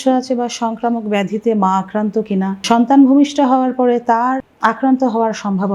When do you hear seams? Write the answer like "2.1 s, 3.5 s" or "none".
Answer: 2.6 s, 4.5 s